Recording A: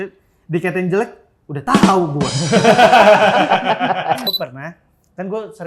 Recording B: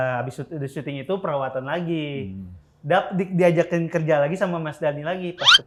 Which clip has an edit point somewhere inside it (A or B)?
A